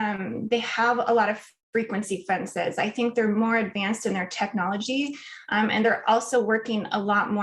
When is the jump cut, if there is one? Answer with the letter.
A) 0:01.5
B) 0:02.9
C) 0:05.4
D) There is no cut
A